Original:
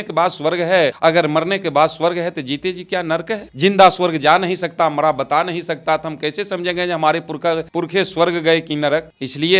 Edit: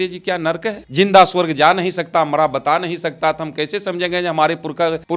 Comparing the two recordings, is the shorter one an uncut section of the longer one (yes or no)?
yes